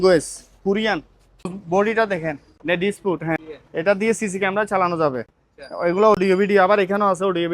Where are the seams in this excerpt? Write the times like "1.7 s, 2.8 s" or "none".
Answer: 1.6 s, 2.5 s, 3.4 s